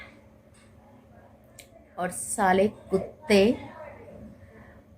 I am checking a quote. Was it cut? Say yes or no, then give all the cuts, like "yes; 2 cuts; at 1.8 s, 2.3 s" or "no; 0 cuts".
yes; 1 cut; at 1.9 s